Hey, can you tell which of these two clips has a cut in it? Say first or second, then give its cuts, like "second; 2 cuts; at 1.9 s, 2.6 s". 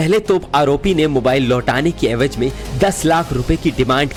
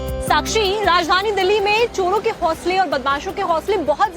second; 1 cut; at 3.2 s